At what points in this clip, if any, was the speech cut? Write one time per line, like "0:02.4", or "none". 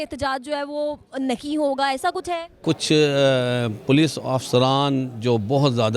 0:02.6